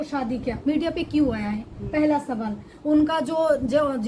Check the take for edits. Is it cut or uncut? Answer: uncut